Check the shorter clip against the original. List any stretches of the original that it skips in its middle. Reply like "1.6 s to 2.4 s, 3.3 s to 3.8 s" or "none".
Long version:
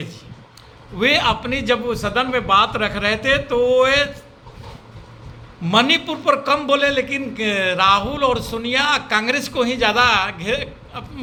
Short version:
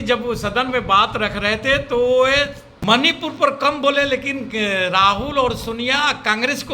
4.3 s to 5.5 s